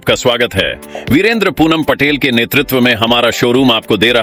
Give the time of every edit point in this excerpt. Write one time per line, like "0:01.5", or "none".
none